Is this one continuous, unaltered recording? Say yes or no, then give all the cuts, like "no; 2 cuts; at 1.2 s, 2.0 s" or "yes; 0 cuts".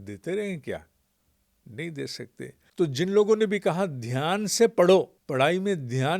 no; 2 cuts; at 2.6 s, 5.2 s